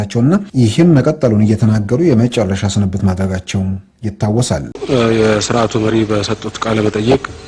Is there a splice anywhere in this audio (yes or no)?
yes